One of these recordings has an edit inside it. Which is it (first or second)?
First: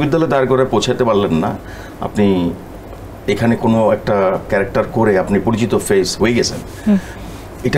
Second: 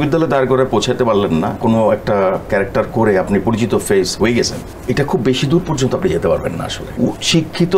second